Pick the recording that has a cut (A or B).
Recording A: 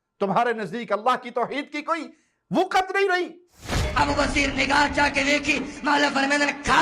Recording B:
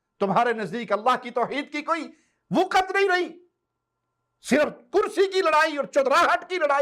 A